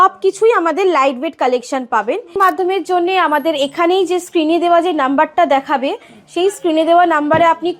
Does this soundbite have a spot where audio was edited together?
yes; 1 cut; at 2.3 s

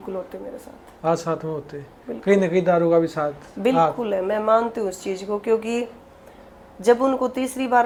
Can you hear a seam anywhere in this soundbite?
no; 0 cuts

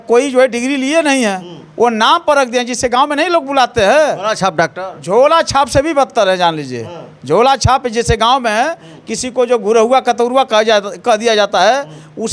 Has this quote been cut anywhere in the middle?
no; 0 cuts

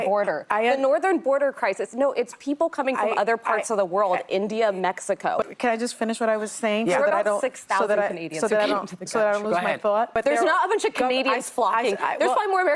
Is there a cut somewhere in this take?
yes; 2 cuts; at 5.5 s, 10.1 s

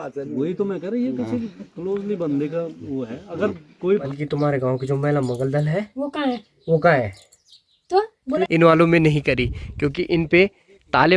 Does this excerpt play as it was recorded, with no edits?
no; 2 cuts; at 4.1 s, 8.3 s

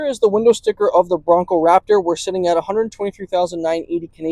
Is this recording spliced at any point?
no; 0 cuts

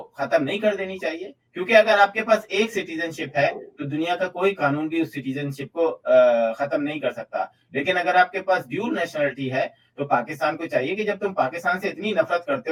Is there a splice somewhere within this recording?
no; 0 cuts

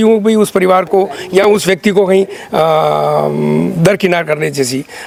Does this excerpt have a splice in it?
no; 0 cuts

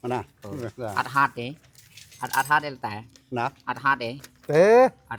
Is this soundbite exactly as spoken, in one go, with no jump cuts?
yes; 0 cuts

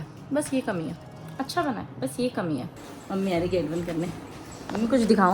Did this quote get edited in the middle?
yes; 1 cut; at 2.7 s

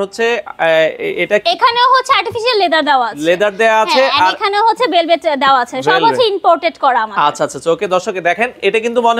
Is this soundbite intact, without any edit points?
yes; 0 cuts

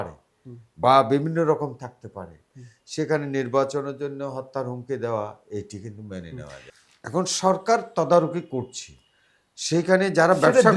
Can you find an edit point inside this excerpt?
yes; 1 cut; at 6.6 s

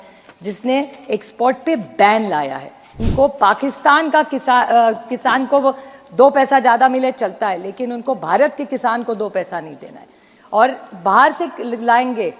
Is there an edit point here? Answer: yes; 1 cut; at 3.0 s

